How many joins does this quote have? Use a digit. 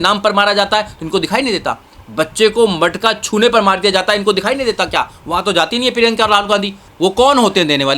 1